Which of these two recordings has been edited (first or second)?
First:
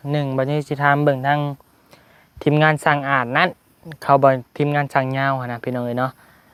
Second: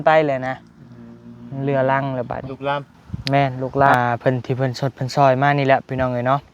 second